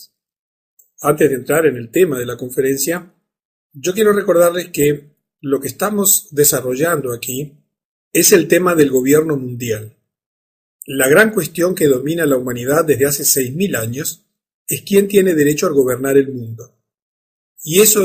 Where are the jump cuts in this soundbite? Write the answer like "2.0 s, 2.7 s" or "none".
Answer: 8.7 s